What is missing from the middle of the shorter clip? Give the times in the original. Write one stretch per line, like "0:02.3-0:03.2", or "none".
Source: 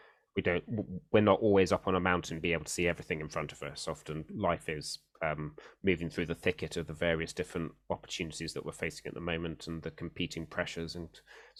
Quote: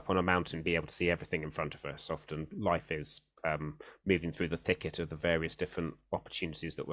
none